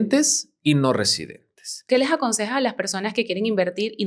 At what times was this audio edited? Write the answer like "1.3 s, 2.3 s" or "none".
1.8 s